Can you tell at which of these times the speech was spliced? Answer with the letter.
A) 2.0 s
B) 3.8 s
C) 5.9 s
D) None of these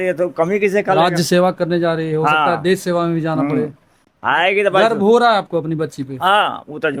D